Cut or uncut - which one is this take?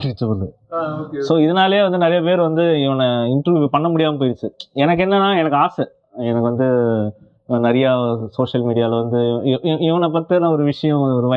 uncut